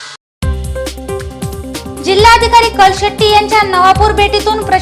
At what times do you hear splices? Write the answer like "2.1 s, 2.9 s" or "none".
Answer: 1.6 s